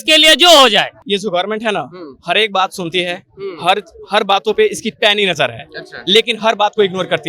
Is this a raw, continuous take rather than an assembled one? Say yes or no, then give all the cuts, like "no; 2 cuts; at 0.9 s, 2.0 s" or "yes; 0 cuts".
no; 1 cut; at 1.0 s